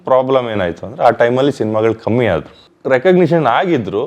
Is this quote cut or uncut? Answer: cut